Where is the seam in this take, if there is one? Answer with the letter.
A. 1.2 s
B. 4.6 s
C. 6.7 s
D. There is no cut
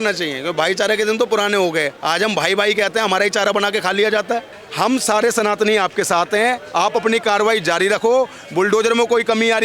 B